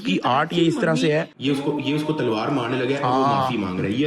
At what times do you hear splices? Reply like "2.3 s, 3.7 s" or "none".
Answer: none